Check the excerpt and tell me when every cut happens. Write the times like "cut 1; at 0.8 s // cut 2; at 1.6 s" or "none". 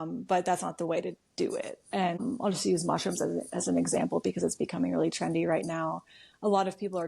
cut 1; at 2.2 s